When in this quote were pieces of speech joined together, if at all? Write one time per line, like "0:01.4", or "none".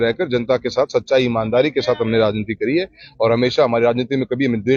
none